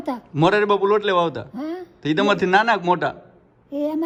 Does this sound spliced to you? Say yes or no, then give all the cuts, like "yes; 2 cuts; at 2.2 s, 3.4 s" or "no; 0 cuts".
no; 0 cuts